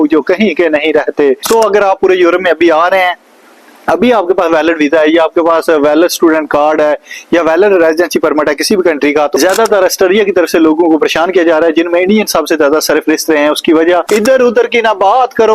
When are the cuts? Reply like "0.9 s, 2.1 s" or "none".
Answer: 1.5 s, 9.3 s, 14.1 s